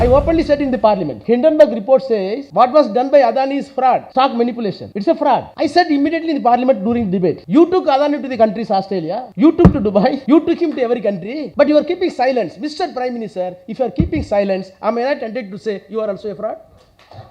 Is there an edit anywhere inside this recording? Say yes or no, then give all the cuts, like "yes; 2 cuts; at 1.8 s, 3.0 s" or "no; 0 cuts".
yes; 9 cuts; at 1.1 s, 2.4 s, 4.1 s, 4.9 s, 5.5 s, 7.4 s, 9.2 s, 10.2 s, 11.3 s